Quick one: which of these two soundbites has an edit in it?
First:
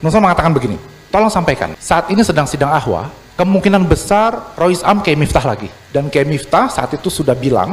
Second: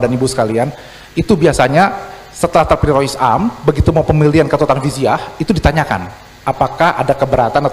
first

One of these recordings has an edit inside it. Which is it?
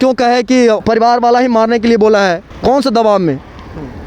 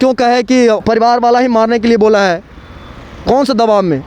first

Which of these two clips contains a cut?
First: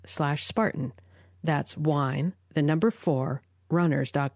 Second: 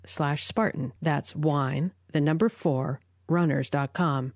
second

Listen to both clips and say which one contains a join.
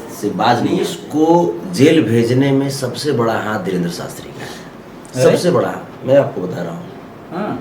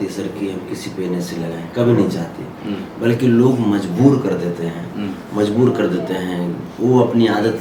first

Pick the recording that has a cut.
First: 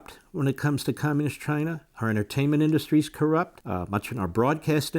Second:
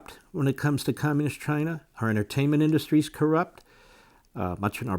first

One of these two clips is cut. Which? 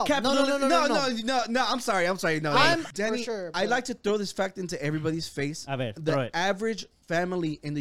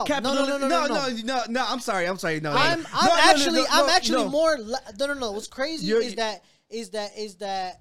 first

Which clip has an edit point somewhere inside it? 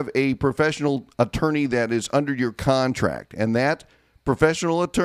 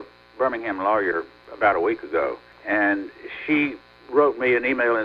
second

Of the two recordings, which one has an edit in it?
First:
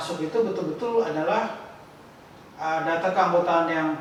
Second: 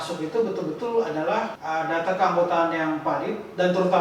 second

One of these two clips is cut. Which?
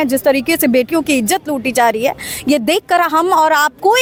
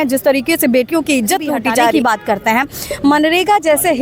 second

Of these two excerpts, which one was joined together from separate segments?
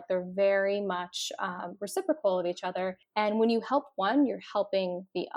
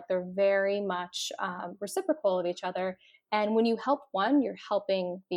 first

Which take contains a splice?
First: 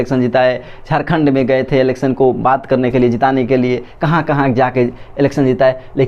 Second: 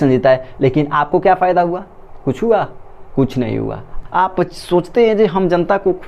second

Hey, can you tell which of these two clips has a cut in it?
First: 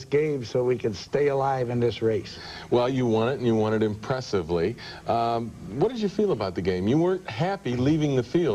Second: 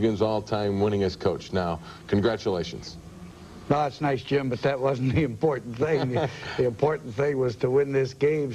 second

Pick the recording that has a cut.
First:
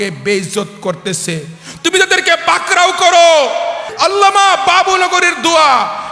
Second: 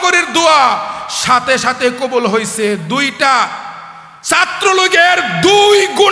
first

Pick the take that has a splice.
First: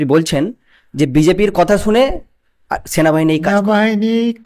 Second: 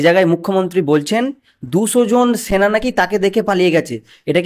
first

